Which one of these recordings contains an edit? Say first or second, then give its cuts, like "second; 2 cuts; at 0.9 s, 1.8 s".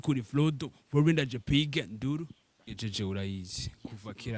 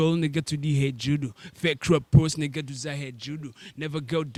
first; 1 cut; at 2.7 s